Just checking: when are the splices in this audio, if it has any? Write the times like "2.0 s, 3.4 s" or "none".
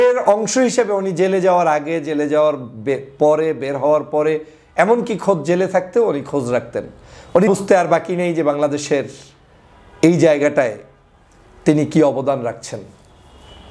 7.5 s